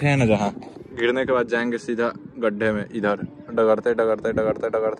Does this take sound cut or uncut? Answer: uncut